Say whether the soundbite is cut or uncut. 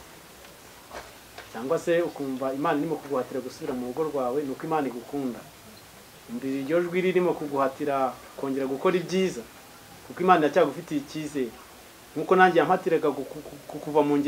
uncut